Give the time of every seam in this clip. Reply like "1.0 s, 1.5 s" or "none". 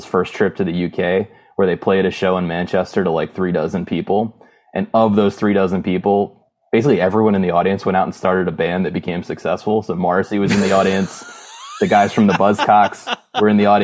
none